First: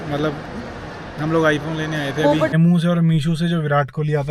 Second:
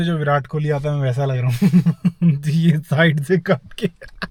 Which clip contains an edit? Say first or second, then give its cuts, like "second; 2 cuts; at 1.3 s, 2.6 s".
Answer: first; 1 cut; at 2.5 s